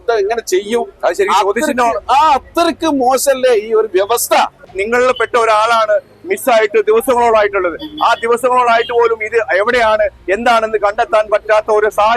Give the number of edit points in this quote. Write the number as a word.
one